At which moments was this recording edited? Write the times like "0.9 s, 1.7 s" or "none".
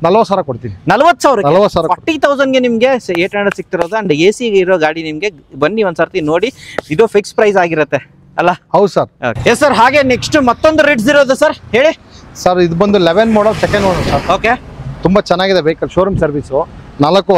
none